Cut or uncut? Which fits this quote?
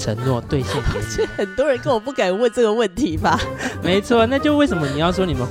cut